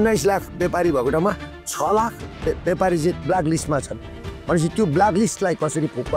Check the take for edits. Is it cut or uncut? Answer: uncut